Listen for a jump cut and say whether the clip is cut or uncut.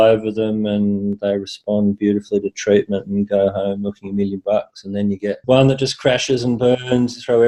uncut